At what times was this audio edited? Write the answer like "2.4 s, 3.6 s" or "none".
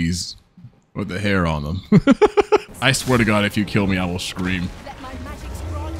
2.7 s